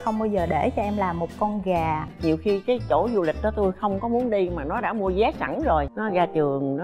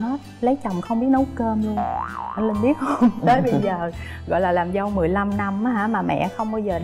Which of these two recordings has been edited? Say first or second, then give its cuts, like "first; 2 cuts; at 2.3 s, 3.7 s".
first; 2 cuts; at 2.1 s, 5.9 s